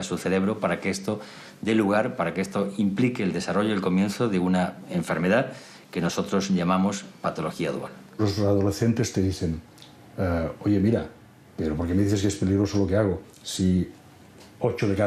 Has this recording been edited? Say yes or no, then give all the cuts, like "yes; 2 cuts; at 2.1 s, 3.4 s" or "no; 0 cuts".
no; 0 cuts